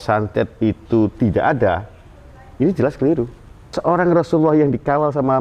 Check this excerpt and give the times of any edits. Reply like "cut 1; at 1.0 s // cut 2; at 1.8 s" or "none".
cut 1; at 3.7 s